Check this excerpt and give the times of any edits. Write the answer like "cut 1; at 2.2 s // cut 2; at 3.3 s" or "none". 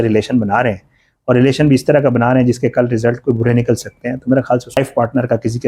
cut 1; at 4.8 s